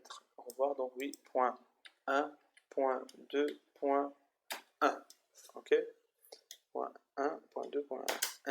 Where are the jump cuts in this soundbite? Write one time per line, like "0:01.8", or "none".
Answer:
none